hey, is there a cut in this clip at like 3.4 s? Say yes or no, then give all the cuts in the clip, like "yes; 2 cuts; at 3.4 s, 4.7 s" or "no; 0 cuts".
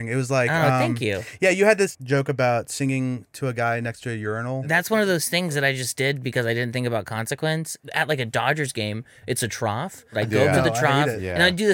no; 4 cuts; at 1.9 s, 4.6 s, 7.8 s, 10.2 s